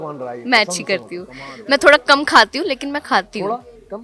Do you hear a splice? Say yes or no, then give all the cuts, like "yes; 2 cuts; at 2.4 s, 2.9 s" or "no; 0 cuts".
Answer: no; 0 cuts